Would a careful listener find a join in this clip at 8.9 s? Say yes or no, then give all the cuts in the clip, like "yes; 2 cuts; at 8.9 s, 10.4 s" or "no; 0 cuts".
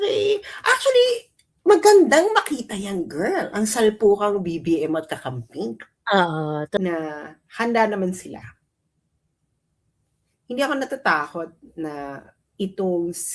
no; 1 cut; at 6.8 s